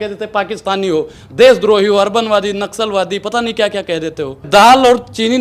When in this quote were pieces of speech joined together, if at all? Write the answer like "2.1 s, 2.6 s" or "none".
4.4 s